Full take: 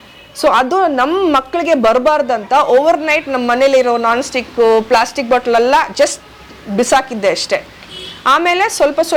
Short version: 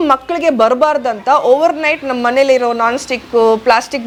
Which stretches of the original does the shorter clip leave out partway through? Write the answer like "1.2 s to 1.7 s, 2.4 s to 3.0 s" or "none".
none